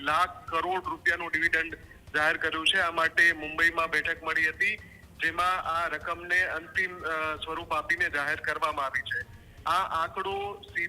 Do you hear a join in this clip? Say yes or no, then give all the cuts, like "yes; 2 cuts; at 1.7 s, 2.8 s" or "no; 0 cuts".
no; 0 cuts